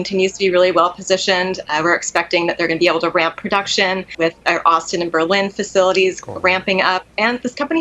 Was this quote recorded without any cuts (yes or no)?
no